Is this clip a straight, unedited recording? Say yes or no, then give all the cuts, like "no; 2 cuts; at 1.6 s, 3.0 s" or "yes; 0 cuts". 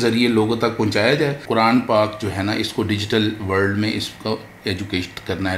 no; 1 cut; at 1.4 s